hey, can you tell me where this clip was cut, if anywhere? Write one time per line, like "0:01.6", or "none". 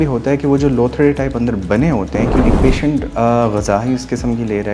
0:02.4